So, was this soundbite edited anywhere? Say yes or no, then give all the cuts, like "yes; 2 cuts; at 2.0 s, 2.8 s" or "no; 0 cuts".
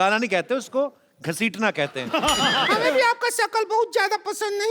yes; 1 cut; at 2.7 s